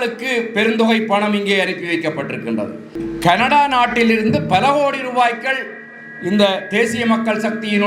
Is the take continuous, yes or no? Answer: no